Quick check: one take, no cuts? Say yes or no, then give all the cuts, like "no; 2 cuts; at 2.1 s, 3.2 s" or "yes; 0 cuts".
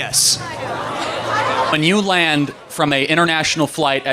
no; 1 cut; at 1.7 s